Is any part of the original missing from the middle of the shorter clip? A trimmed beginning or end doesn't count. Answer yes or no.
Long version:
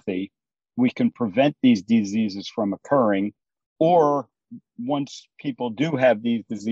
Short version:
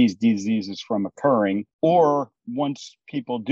yes